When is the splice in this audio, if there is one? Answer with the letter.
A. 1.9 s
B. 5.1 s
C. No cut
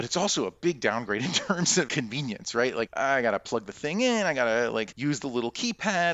A